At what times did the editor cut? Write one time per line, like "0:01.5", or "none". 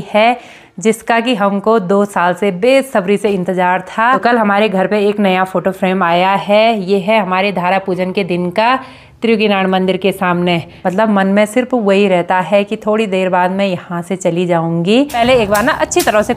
0:04.2
0:10.7
0:15.1